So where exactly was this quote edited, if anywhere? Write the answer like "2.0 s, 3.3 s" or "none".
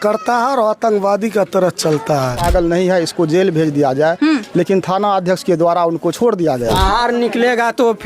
2.4 s, 6.7 s